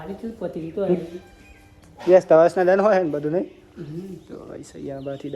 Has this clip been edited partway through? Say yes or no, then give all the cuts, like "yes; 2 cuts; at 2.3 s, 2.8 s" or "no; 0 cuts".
no; 0 cuts